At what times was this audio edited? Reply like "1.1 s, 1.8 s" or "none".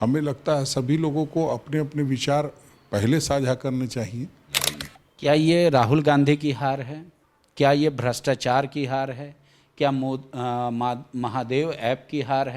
4.6 s